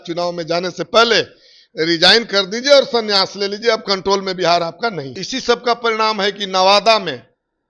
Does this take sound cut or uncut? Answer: cut